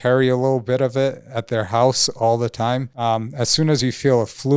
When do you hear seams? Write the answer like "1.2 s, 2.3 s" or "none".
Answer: none